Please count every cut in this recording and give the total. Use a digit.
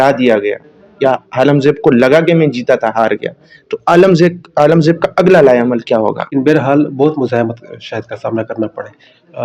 1